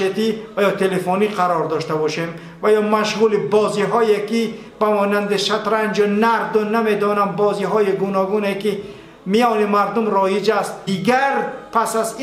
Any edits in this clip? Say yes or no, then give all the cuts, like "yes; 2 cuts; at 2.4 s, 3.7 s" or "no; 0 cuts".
yes; 1 cut; at 10.8 s